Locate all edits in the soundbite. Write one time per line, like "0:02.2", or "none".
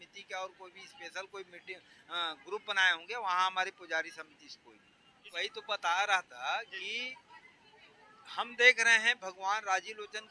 0:05.3